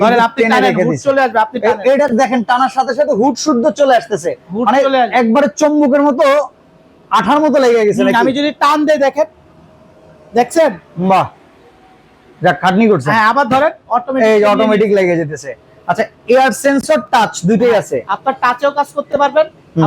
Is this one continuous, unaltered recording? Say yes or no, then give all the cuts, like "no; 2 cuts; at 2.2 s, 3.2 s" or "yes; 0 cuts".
yes; 0 cuts